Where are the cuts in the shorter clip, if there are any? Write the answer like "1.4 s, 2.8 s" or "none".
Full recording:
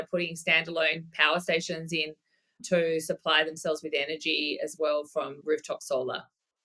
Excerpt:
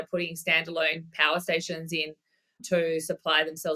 none